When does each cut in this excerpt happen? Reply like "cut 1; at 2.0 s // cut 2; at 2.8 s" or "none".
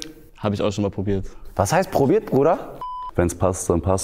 cut 1; at 2.8 s